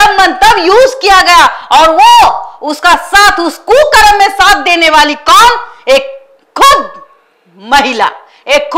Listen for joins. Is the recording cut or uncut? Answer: uncut